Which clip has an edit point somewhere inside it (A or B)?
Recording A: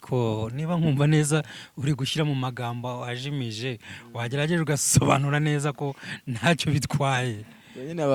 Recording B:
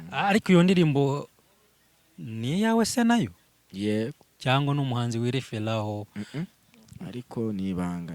B